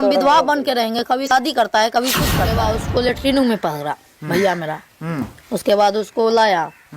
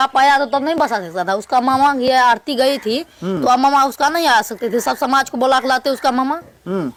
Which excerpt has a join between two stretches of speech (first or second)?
first